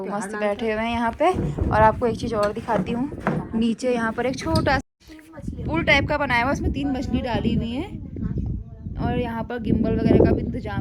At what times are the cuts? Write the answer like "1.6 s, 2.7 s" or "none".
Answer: none